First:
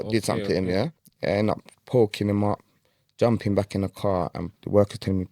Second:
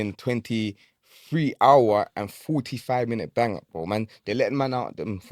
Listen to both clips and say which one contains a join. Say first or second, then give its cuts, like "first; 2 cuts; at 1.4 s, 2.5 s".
first; 2 cuts; at 1.0 s, 4.5 s